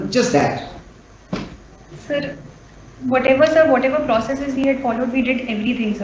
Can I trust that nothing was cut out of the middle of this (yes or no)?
yes